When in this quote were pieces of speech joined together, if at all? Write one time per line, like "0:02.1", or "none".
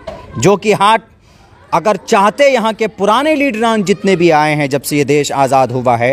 none

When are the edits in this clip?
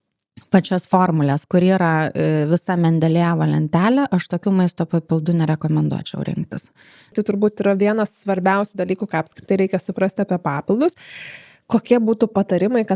0:07.1

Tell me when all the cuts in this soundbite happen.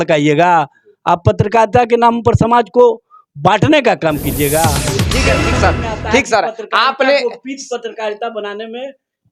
0:04.9

